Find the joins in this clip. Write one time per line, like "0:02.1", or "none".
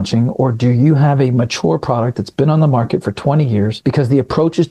0:03.8